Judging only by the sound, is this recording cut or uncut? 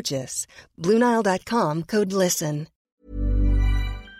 cut